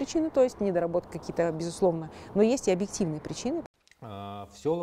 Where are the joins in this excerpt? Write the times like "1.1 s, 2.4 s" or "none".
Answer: 3.7 s